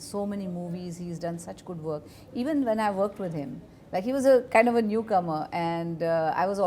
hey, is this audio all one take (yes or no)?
yes